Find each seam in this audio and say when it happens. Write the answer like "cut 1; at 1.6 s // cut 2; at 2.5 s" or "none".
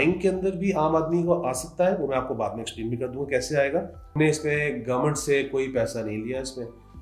cut 1; at 4.1 s